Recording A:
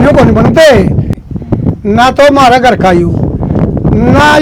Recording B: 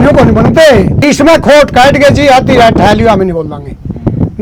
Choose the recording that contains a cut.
A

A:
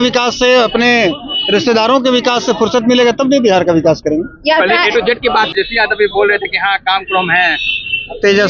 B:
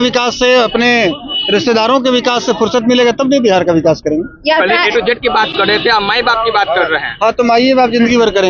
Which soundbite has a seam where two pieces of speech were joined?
A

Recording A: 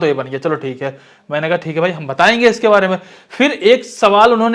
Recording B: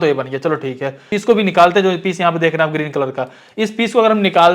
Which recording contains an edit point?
B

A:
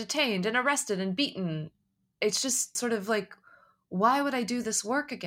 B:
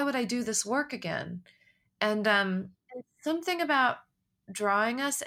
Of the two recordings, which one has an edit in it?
A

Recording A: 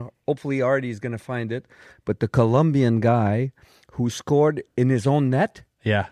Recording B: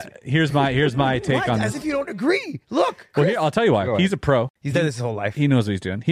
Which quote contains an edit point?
B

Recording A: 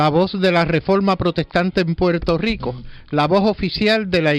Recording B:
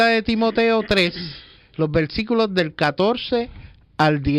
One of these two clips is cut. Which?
B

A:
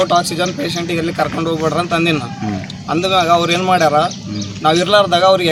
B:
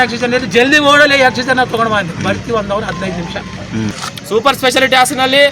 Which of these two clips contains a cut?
B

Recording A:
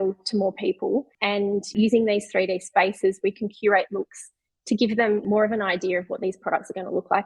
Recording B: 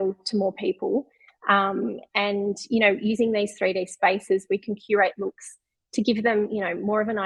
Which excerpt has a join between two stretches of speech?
A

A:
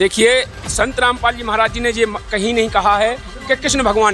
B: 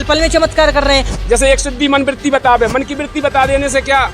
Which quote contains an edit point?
B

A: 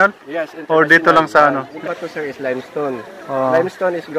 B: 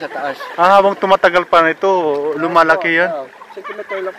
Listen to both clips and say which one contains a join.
A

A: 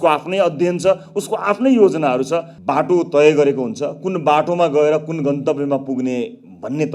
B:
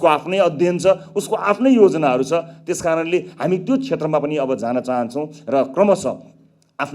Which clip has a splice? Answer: A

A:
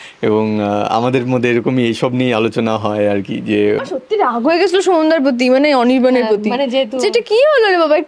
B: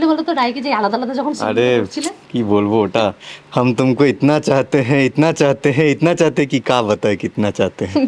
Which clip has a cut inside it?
A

